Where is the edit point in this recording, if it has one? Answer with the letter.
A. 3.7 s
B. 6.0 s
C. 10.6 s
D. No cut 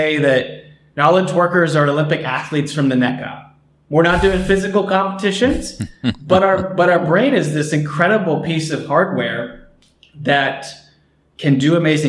D